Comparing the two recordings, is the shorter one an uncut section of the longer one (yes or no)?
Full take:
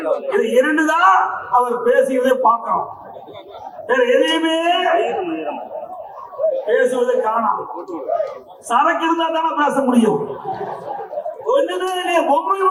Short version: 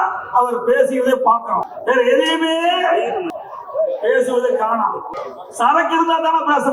no